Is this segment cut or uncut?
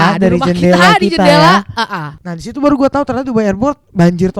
cut